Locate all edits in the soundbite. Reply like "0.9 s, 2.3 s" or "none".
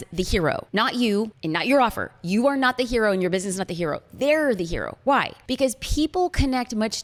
none